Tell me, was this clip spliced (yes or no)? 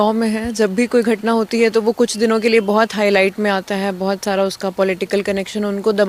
no